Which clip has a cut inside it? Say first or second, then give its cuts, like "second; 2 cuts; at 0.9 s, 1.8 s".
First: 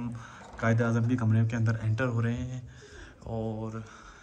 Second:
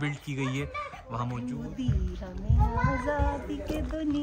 second; 1 cut; at 1.5 s